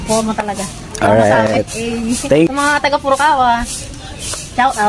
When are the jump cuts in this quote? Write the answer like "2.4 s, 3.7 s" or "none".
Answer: 2.5 s

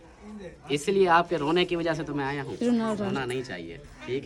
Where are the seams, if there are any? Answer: none

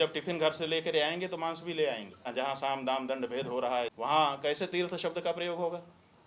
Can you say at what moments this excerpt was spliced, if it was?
2.2 s, 3.9 s

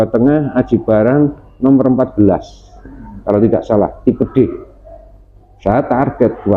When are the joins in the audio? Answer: none

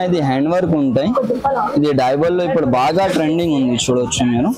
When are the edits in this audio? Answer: none

